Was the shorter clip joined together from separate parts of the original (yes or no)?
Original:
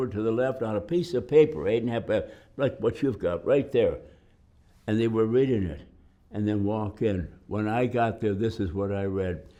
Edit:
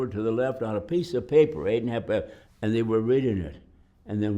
yes